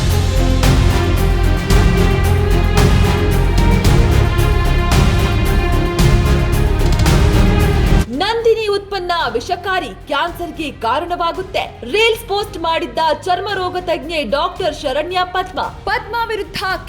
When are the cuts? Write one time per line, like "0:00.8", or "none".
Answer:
0:01.0